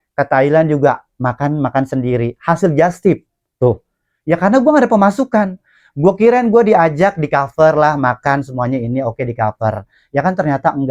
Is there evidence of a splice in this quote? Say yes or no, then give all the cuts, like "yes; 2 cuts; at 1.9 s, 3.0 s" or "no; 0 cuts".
no; 0 cuts